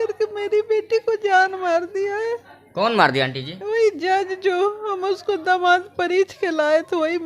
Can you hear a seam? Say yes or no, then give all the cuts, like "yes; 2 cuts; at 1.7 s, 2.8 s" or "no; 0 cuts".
no; 0 cuts